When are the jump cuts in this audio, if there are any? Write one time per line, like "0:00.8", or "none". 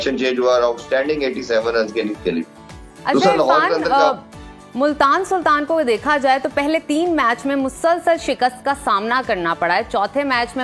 none